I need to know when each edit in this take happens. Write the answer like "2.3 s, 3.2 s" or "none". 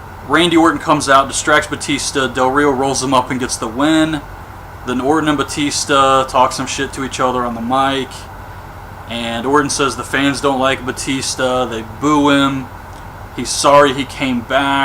8.2 s

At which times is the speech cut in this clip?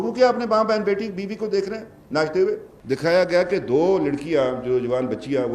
2.7 s

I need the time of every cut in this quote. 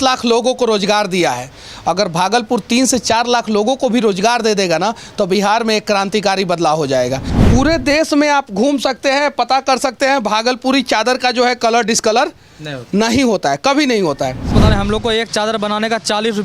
7.3 s, 14.5 s

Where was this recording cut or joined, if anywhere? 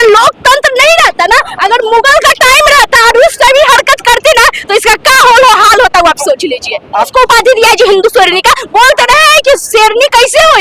7.1 s

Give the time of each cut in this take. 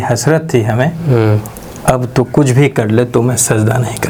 none

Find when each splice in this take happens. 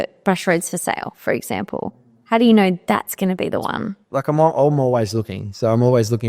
4.0 s

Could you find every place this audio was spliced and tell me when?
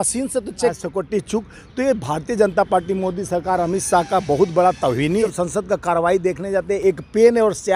0.7 s, 5.3 s

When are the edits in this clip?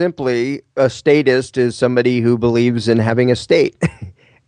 none

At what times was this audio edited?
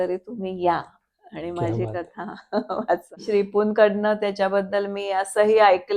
3.2 s

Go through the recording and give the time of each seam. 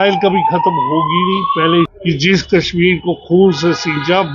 1.9 s

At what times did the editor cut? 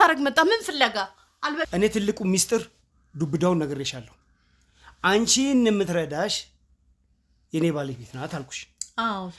1.7 s

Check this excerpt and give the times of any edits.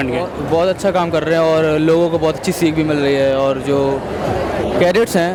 none

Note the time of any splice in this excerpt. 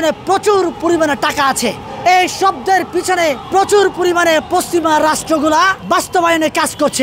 1.9 s, 3.4 s, 5.8 s

